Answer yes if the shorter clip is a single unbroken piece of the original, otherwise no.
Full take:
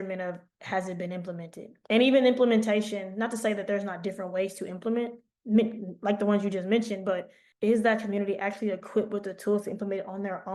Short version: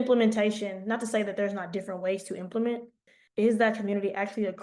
no